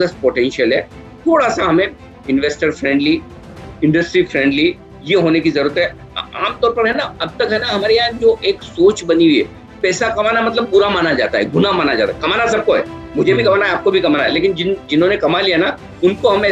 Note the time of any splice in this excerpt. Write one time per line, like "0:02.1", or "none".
none